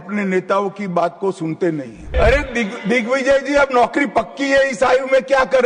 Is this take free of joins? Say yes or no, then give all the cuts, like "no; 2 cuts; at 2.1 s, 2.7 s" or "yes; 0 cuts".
no; 1 cut; at 2.1 s